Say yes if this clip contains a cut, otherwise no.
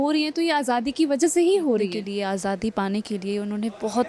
yes